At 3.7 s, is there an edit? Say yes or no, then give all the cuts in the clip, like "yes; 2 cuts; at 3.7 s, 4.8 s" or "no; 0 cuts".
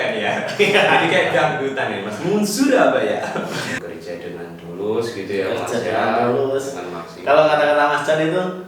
yes; 1 cut; at 3.7 s